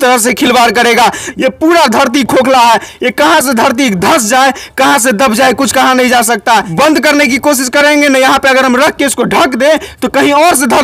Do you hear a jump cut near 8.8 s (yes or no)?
no